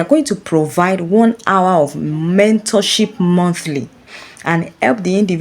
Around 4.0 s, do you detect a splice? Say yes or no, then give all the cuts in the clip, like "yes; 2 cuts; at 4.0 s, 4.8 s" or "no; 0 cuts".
yes; 1 cut; at 4.0 s